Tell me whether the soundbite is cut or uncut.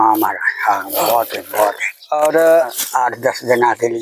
uncut